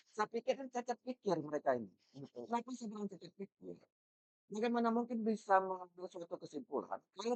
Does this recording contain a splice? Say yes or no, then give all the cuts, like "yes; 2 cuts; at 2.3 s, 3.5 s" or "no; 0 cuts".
no; 0 cuts